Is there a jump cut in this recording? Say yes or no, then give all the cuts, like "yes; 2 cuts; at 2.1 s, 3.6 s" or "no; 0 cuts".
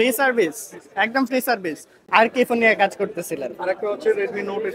no; 0 cuts